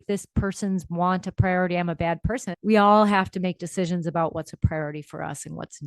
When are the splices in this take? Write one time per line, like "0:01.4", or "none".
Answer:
0:02.5